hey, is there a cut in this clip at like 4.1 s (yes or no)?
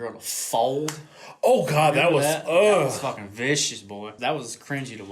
yes